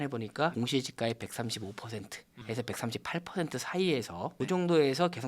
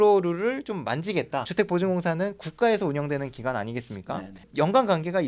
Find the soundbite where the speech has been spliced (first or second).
first